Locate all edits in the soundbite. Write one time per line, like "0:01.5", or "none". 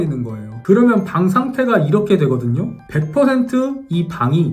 0:02.8